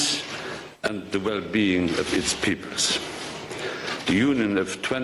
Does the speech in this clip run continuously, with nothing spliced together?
no; 1 cut; at 3.8 s

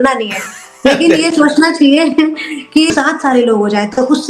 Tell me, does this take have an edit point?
yes; 1 cut; at 2.9 s

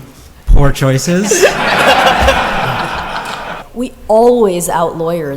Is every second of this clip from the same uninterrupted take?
no; 1 cut; at 3.6 s

